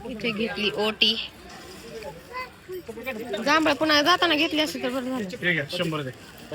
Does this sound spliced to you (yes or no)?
no